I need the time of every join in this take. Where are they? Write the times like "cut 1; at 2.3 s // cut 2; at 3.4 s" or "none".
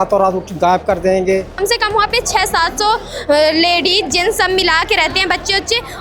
cut 1; at 1.6 s